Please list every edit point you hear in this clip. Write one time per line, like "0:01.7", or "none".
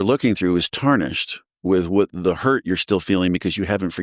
none